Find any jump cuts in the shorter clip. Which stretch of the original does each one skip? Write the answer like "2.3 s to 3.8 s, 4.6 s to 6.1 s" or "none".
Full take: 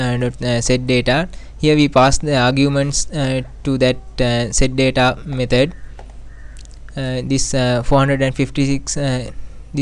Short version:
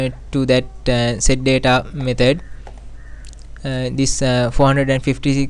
none